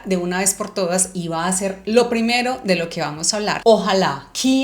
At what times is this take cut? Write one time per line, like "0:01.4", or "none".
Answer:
0:03.6